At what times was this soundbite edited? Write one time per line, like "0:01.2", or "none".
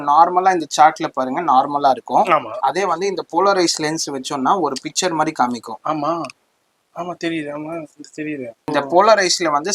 0:08.7